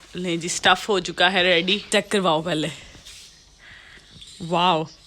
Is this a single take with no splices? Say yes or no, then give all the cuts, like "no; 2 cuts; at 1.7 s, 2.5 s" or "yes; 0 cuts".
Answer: no; 1 cut; at 1.9 s